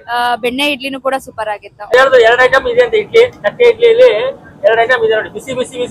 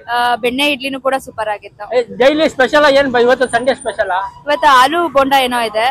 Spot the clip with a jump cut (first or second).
first